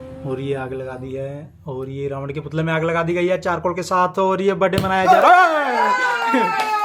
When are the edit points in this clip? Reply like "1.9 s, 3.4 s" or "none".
none